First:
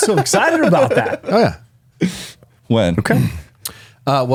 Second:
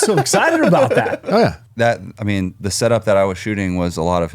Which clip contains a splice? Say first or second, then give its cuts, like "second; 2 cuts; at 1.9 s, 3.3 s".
second; 1 cut; at 1.6 s